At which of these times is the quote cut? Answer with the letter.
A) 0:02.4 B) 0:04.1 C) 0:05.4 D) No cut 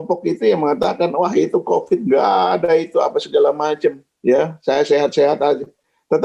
B